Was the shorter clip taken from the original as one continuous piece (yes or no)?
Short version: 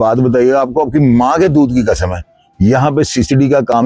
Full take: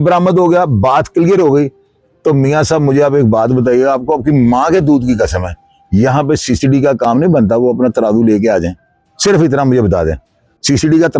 yes